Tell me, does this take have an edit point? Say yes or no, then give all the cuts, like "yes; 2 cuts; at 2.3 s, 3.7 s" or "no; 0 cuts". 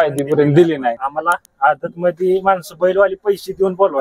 yes; 1 cut; at 0.9 s